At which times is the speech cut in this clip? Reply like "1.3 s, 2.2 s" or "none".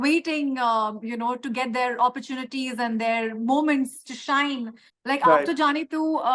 4.8 s